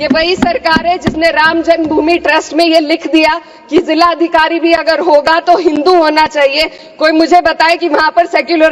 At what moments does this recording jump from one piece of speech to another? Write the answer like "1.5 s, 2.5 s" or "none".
none